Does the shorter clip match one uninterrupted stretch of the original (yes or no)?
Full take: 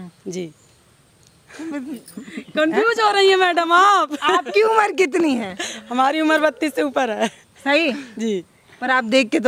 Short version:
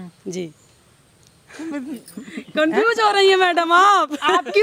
yes